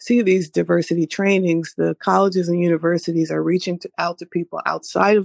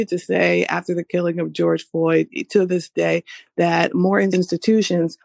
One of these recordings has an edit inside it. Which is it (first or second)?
second